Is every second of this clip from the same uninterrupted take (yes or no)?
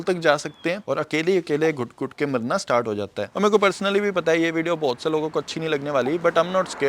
no